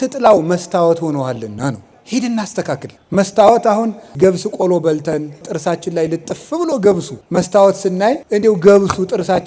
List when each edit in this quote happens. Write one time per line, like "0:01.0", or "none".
0:01.9
0:02.9
0:04.2
0:05.5
0:07.1
0:08.2